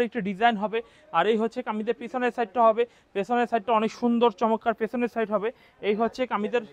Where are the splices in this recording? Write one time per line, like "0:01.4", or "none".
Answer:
none